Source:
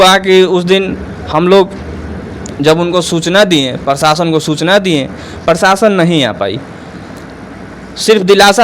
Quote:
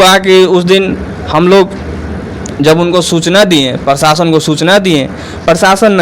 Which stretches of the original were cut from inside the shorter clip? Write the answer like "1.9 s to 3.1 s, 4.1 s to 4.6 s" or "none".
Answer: none

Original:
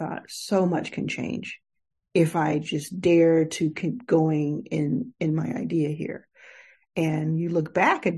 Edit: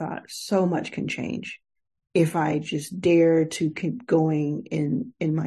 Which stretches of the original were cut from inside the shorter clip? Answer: none

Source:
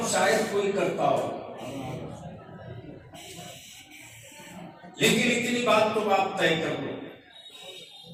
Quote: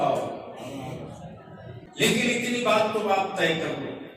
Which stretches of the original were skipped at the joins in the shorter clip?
2.8 s to 4.8 s

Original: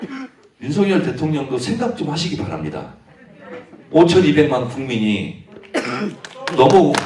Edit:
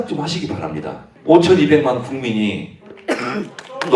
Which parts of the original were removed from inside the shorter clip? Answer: 3.0 s to 3.7 s

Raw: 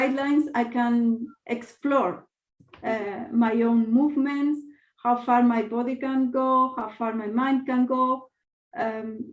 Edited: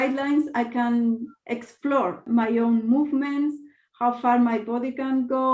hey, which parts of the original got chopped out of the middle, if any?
2.2 s to 3.2 s

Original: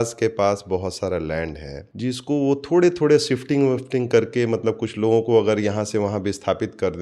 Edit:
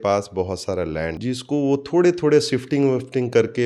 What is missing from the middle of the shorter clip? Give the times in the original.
1.5 s to 1.9 s

